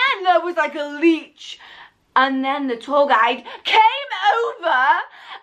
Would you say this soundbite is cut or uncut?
uncut